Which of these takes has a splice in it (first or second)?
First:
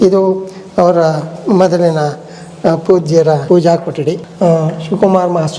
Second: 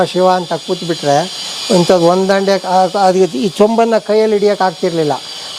first